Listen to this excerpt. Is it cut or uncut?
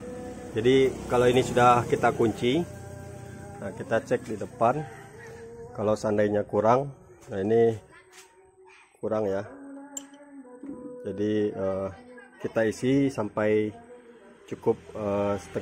uncut